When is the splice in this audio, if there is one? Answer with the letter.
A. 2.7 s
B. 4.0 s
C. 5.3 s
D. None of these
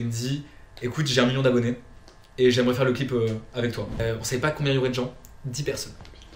B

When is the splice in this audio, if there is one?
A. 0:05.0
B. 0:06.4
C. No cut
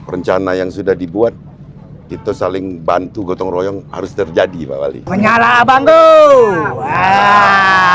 A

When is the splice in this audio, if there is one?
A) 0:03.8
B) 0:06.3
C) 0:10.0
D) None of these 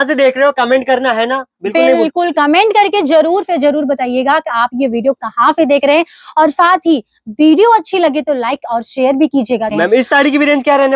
C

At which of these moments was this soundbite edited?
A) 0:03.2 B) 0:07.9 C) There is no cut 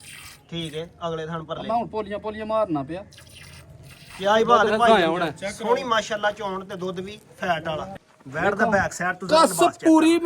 B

